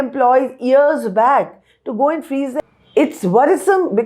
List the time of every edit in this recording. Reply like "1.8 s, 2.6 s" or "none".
2.6 s